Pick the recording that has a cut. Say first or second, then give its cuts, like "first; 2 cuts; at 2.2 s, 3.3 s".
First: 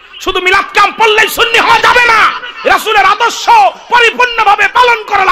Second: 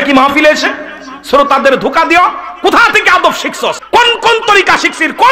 second; 1 cut; at 3.8 s